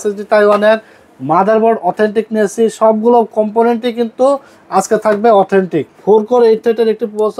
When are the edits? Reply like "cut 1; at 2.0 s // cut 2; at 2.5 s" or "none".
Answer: cut 1; at 5.9 s